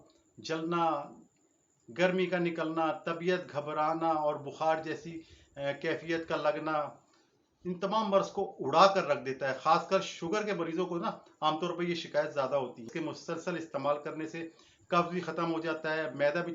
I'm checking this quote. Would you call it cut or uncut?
cut